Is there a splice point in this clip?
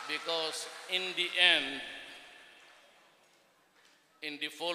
no; 0 cuts

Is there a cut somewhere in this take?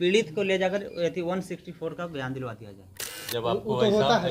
yes; 1 cut; at 3.2 s

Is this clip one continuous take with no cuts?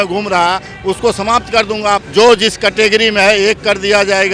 no; 1 cut; at 2.0 s

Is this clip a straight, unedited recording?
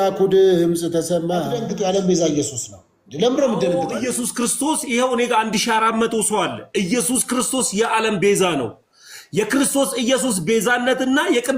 no; 2 cuts; at 1.6 s, 3.9 s

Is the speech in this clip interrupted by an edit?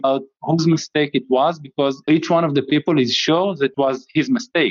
yes; 1 cut; at 3.7 s

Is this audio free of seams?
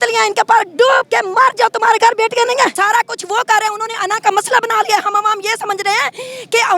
no; 2 cuts; at 1.1 s, 2.7 s

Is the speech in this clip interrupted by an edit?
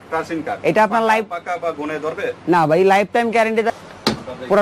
yes; 1 cut; at 3.7 s

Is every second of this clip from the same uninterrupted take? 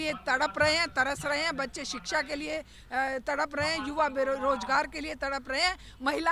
yes; 0 cuts

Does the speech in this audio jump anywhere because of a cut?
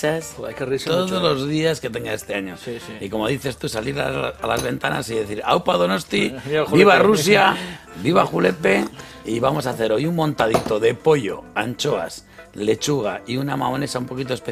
yes; 1 cut; at 4.7 s

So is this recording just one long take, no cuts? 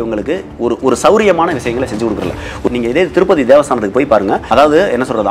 no; 2 cuts; at 2.6 s, 4.5 s

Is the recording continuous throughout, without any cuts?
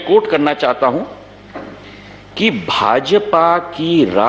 yes; 0 cuts

